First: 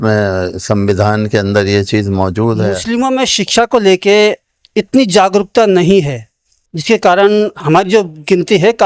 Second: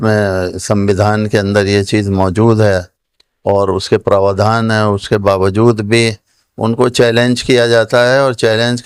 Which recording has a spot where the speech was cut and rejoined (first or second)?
first